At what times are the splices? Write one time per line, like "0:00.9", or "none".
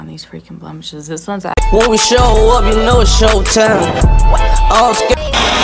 0:01.5

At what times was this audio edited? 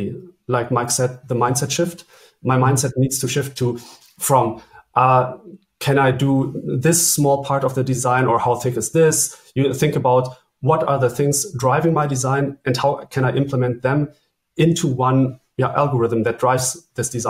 none

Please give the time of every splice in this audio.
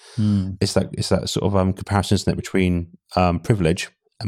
none

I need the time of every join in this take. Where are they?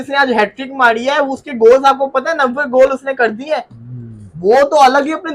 none

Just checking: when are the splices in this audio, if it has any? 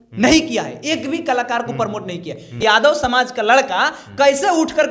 0:02.6

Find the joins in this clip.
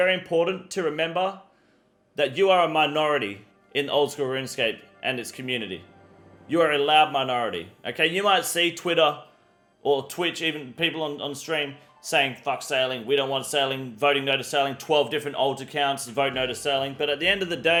none

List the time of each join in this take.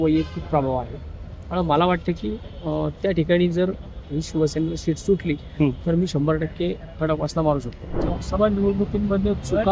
0:07.9

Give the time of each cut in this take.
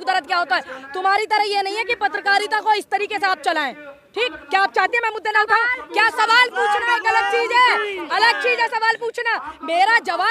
none

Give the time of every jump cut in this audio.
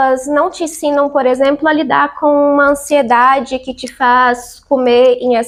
none

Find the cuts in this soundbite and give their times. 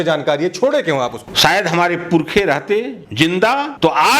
0:01.2

